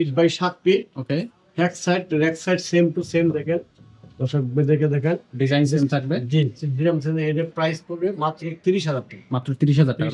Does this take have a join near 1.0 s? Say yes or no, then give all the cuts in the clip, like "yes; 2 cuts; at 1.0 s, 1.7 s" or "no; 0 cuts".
no; 0 cuts